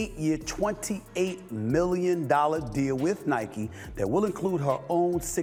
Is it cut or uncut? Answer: uncut